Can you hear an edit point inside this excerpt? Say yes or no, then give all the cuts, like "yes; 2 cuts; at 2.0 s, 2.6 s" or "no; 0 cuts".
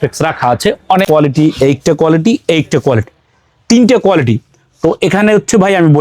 yes; 1 cut; at 1.1 s